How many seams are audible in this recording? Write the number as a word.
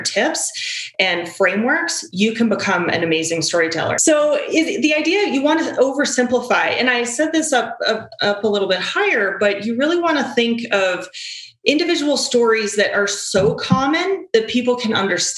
one